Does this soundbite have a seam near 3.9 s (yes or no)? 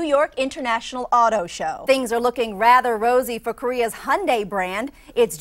no